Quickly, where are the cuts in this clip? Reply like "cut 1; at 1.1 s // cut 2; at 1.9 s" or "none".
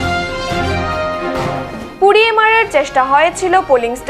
cut 1; at 1.1 s